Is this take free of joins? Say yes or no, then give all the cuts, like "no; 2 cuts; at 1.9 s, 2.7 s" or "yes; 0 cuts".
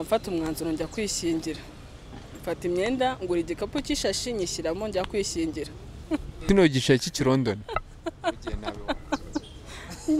no; 1 cut; at 6.4 s